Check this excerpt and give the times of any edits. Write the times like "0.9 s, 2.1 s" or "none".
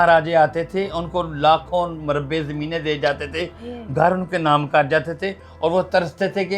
none